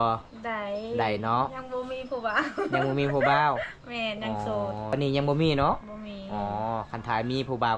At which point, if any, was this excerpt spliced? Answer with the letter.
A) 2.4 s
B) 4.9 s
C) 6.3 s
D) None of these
B